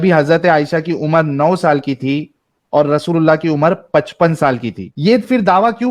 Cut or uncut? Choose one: cut